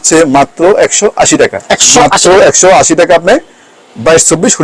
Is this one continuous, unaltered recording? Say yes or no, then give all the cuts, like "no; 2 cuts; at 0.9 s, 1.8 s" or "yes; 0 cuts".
yes; 0 cuts